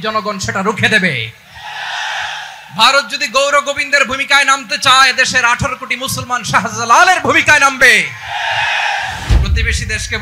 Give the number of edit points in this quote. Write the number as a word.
one